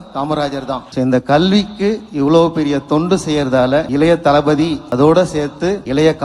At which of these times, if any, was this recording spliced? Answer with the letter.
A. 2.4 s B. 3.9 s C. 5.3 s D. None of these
D